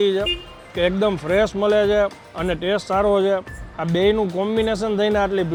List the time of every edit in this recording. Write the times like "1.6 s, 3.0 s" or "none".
none

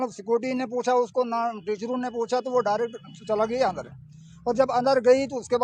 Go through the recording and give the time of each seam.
none

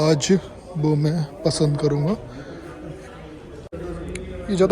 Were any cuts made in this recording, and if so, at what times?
3.7 s

